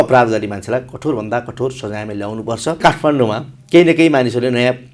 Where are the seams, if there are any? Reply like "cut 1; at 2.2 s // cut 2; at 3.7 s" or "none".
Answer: cut 1; at 2.8 s